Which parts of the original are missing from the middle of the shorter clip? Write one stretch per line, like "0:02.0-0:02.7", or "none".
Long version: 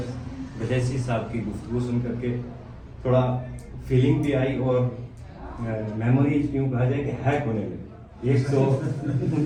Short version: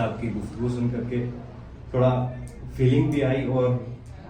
none